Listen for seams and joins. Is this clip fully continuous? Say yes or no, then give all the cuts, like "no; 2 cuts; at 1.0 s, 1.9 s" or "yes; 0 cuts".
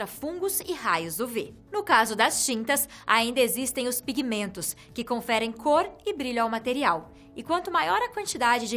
yes; 0 cuts